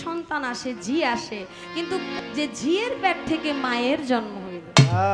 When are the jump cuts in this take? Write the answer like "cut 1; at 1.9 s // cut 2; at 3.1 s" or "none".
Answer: cut 1; at 2.1 s